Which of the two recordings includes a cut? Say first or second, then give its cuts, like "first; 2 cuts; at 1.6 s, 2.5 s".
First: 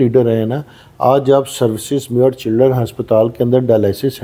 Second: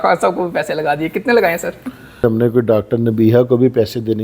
second; 1 cut; at 2.2 s